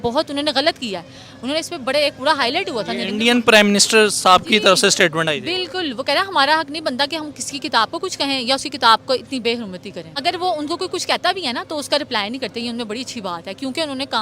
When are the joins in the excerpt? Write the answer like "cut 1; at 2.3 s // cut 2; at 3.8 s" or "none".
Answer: cut 1; at 10.2 s